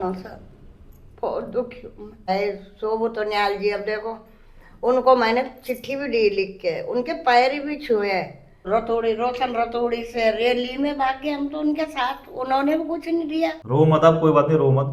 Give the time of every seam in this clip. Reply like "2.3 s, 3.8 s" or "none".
2.3 s, 8.7 s, 13.6 s

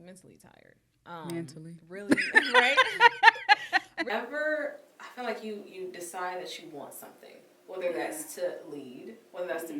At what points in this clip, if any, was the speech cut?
4.1 s

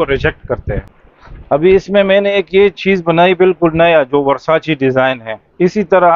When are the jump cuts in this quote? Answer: 1.0 s

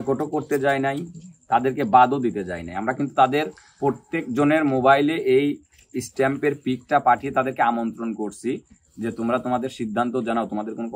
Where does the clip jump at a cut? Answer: none

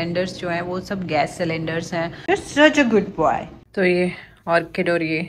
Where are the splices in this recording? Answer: 2.1 s, 3.5 s

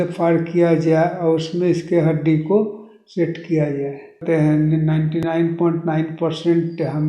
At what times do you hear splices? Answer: 4.2 s

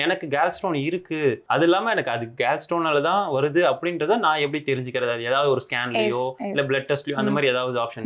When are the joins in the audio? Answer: 1.4 s

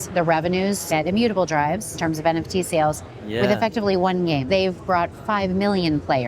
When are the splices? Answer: 0.8 s, 1.9 s, 4.5 s

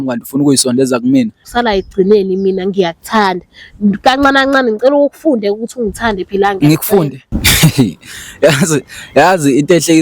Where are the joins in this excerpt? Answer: 1.4 s

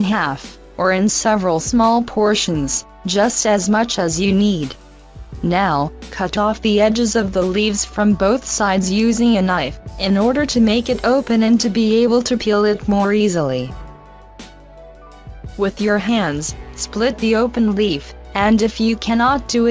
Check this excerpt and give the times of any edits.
16.4 s

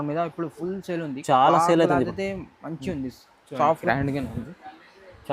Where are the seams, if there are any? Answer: 3.8 s

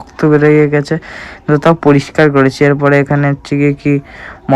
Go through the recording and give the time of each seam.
none

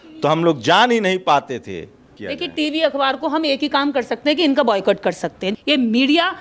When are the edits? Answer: 2.2 s, 5.5 s

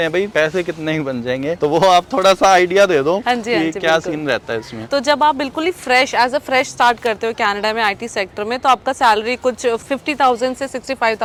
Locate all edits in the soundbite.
none

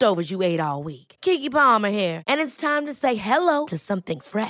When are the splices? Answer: none

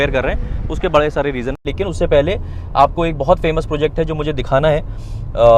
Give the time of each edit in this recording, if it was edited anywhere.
1.7 s

